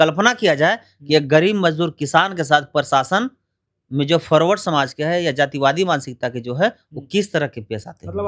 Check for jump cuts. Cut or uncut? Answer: uncut